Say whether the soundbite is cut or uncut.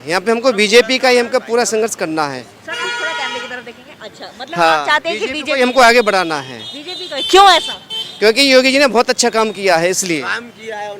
uncut